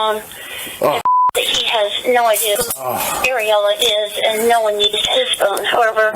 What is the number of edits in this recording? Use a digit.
1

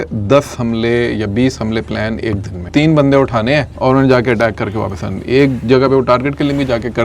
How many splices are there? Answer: 2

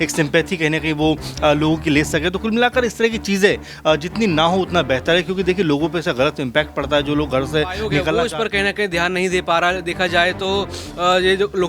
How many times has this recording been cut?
1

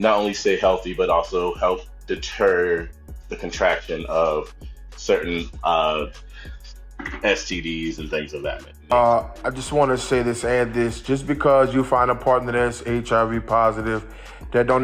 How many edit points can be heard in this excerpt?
1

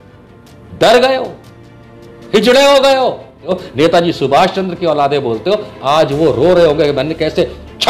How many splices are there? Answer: 1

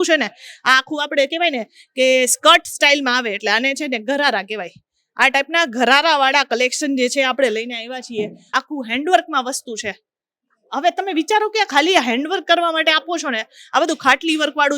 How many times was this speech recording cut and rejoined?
1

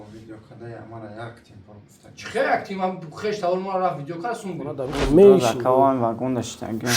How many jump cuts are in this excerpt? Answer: 1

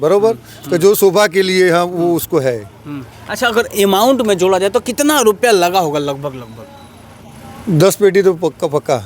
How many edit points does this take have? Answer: 0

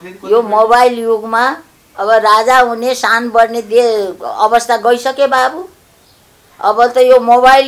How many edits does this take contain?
0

